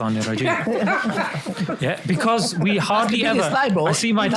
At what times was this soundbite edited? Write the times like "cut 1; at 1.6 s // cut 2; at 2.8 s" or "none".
none